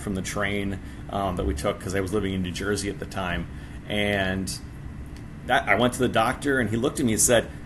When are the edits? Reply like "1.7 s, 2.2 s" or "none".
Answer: none